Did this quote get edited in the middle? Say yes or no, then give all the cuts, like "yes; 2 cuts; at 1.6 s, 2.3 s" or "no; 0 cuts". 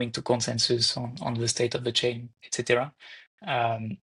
no; 0 cuts